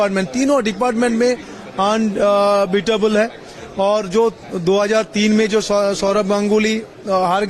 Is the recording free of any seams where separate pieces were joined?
yes; 0 cuts

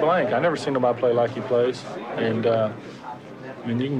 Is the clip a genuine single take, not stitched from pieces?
yes; 0 cuts

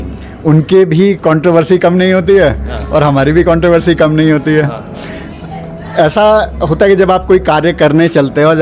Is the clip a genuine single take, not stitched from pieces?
yes; 0 cuts

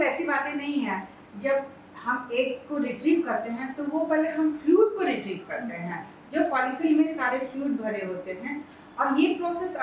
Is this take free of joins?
yes; 0 cuts

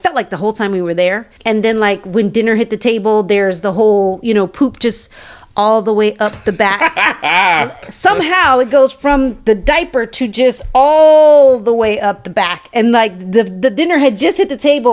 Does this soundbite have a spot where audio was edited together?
no; 0 cuts

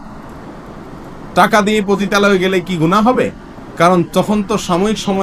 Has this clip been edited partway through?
no; 0 cuts

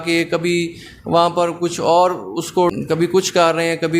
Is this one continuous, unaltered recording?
no; 1 cut; at 2.8 s

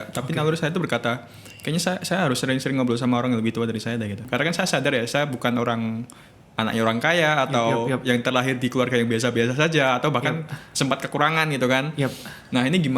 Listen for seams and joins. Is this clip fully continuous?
no; 1 cut; at 4.3 s

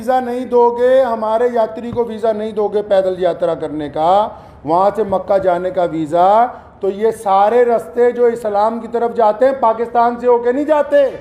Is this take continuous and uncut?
yes; 0 cuts

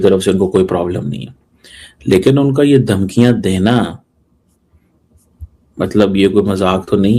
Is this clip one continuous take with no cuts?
yes; 0 cuts

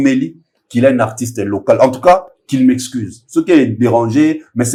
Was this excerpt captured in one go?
yes; 0 cuts

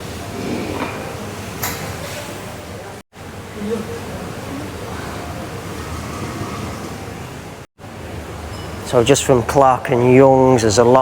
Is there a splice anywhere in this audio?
no; 0 cuts

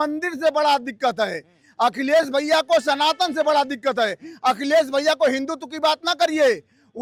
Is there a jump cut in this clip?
no; 0 cuts

